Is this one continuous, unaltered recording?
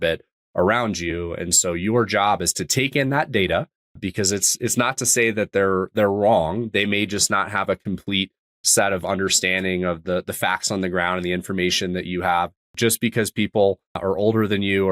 no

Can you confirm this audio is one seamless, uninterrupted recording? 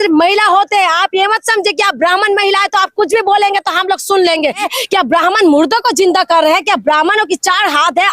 no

